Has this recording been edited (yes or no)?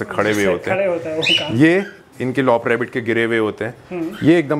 no